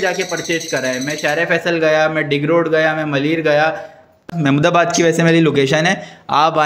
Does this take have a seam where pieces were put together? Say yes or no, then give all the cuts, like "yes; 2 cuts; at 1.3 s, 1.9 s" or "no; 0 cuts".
yes; 1 cut; at 4.3 s